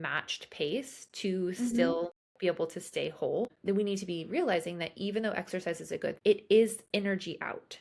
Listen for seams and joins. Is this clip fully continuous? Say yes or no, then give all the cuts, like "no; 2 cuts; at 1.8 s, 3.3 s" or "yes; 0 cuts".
no; 1 cut; at 6.2 s